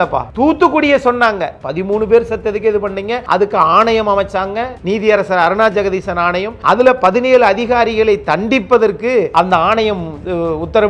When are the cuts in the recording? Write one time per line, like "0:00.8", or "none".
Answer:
0:01.6